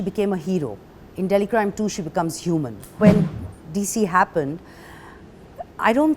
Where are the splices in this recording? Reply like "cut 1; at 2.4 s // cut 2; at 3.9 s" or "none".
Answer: cut 1; at 3.0 s

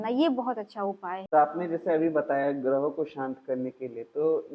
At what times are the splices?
cut 1; at 1.1 s

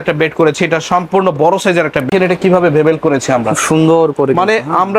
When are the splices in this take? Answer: cut 1; at 2.1 s

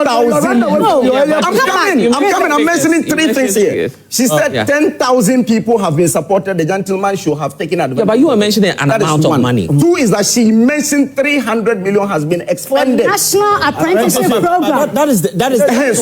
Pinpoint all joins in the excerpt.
cut 1; at 8.7 s

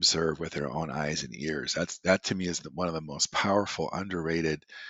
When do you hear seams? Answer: none

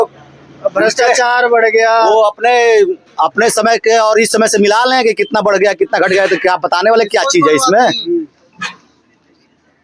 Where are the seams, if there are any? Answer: cut 1; at 7.8 s

